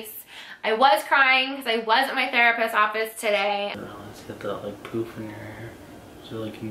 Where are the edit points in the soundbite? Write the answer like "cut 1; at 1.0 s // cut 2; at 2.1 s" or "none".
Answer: cut 1; at 3.7 s